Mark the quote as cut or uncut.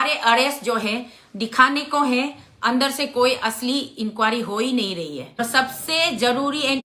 cut